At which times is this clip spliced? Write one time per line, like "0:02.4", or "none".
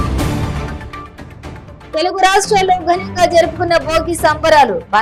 none